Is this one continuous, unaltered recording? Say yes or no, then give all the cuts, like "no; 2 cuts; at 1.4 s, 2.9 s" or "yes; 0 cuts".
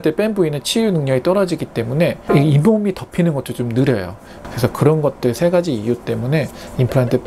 yes; 0 cuts